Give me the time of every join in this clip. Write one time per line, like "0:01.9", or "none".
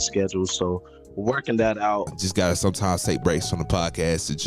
0:02.2